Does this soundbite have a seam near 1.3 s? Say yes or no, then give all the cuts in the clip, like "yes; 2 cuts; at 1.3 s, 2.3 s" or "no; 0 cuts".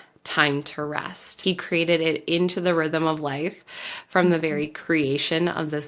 yes; 1 cut; at 1.3 s